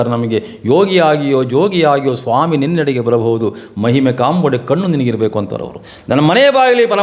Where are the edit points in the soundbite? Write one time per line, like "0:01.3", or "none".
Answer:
none

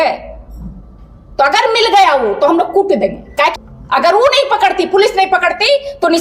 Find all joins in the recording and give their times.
0:03.5

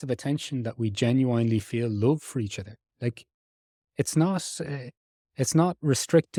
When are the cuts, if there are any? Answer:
none

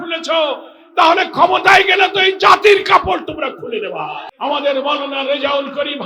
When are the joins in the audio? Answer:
0:04.2

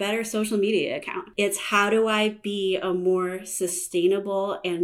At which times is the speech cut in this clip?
0:01.2

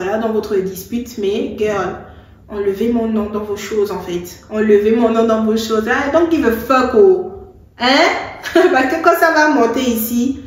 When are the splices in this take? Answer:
none

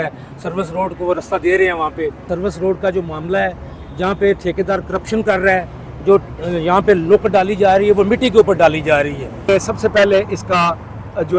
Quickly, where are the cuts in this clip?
0:02.3
0:09.5

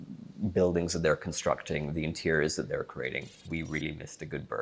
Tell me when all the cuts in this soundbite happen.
0:03.4

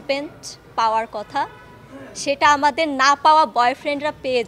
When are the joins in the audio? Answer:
none

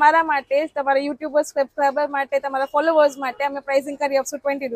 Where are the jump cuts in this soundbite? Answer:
none

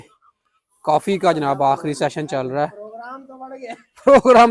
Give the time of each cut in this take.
none

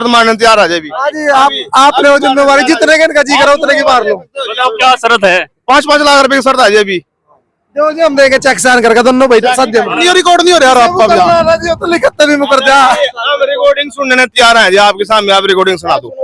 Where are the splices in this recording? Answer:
0:10.0

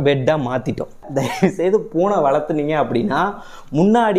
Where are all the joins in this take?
0:01.1

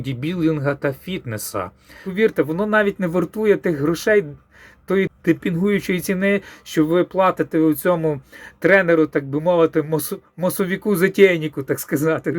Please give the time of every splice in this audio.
0:02.0

